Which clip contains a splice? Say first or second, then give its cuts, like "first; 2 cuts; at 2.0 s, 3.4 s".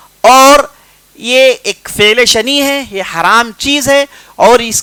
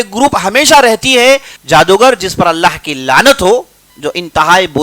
second; 1 cut; at 1.5 s